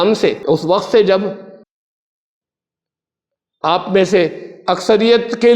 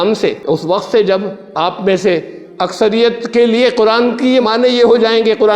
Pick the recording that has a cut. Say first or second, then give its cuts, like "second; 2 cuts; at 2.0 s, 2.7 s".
second; 1 cut; at 1.4 s